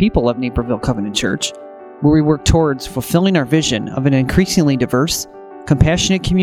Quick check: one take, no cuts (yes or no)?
yes